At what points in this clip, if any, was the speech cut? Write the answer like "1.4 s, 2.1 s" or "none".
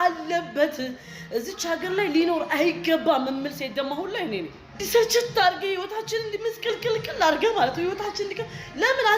4.8 s